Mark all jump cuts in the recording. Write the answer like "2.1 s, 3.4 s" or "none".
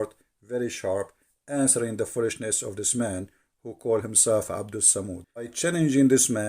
5.5 s